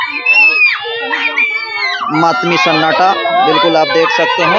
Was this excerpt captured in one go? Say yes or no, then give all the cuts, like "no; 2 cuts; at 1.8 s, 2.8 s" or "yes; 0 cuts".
yes; 0 cuts